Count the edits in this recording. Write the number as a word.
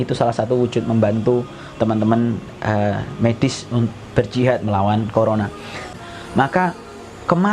one